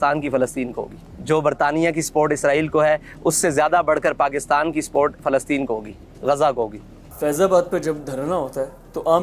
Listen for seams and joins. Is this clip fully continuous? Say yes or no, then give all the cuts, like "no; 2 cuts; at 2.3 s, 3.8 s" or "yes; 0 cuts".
yes; 0 cuts